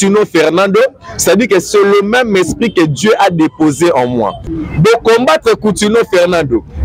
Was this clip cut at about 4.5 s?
yes; 1 cut; at 4.5 s

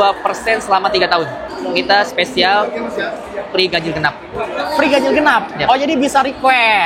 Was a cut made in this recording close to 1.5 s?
yes; 1 cut; at 1.5 s

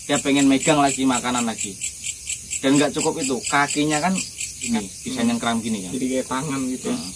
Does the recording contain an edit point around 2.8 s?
no; 1 cut; at 4.7 s

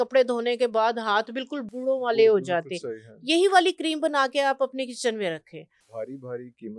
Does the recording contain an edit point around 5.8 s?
yes; 1 cut; at 5.8 s

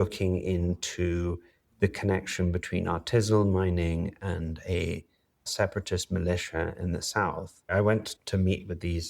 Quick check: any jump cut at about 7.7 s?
yes; 1 cut; at 7.7 s

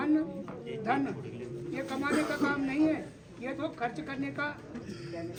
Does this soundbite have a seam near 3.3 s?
no; 0 cuts

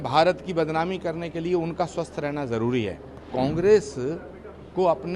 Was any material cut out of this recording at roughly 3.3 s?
yes; 1 cut; at 3.3 s

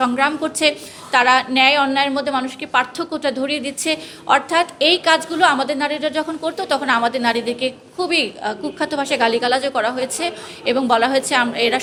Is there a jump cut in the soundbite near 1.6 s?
no; 0 cuts

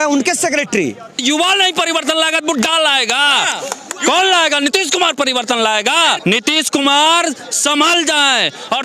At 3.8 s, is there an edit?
no; 2 cuts; at 1.2 s, 6.2 s

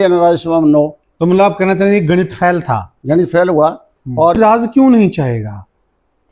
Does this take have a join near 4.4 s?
yes; 1 cut; at 4.4 s

